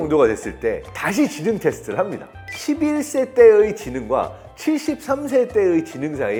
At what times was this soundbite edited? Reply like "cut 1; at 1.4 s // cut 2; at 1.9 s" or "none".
none